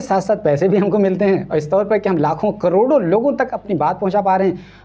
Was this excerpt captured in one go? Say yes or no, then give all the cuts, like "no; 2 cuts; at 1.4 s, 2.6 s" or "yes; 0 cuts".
yes; 0 cuts